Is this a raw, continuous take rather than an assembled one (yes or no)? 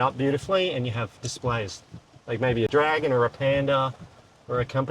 yes